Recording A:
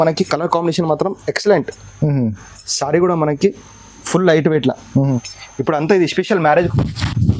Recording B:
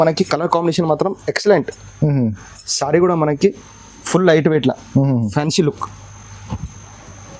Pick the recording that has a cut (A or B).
A